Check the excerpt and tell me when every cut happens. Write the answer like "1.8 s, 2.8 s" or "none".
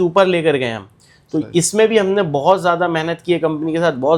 none